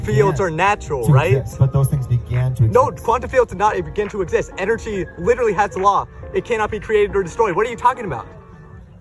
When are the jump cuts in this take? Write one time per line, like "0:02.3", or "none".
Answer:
none